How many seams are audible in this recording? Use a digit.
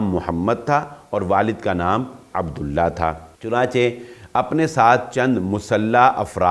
1